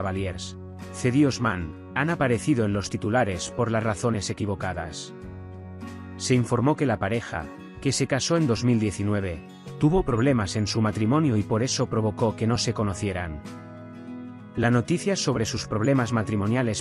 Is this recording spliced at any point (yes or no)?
no